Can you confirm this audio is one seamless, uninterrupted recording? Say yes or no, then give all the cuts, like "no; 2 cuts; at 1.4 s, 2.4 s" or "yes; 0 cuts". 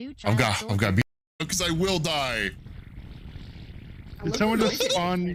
yes; 0 cuts